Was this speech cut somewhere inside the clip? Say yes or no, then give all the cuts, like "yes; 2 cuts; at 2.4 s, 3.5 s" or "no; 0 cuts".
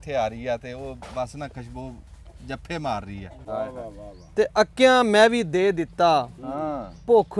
yes; 1 cut; at 3.4 s